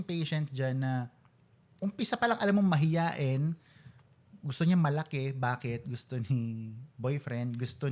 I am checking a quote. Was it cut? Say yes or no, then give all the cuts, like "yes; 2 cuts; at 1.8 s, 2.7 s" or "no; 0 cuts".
no; 0 cuts